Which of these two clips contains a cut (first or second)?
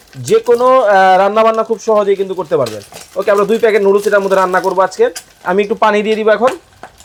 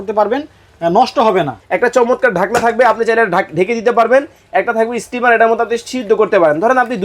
second